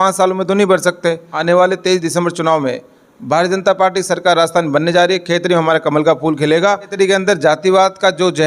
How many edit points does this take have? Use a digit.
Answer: 2